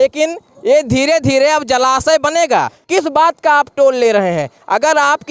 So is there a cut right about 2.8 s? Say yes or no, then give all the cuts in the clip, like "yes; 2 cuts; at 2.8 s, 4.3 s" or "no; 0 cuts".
yes; 1 cut; at 2.8 s